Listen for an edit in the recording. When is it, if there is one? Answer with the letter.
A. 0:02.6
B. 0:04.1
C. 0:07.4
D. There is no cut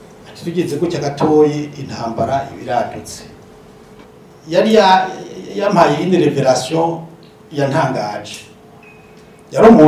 B